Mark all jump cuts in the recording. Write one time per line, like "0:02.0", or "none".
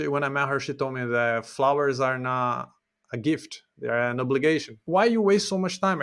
0:04.8